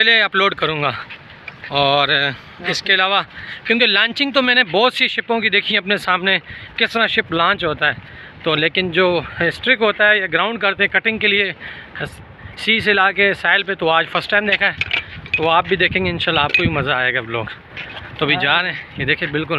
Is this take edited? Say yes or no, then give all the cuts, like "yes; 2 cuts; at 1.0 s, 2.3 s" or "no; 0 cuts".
no; 0 cuts